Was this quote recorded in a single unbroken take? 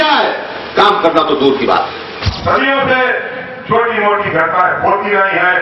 no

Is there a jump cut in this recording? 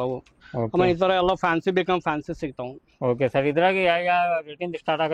no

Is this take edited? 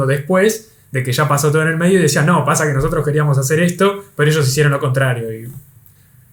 no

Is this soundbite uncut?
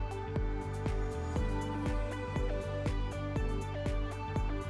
yes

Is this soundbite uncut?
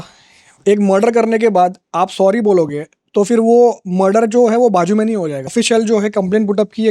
no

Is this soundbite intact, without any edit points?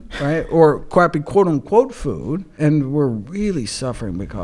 no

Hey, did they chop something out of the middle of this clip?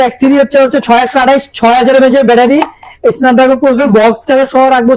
no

